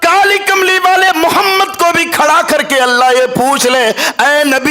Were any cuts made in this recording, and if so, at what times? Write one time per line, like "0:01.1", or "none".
none